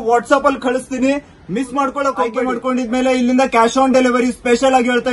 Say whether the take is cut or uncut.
cut